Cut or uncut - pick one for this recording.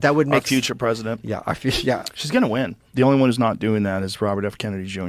cut